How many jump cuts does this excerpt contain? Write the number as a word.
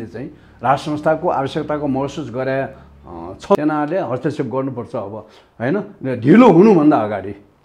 one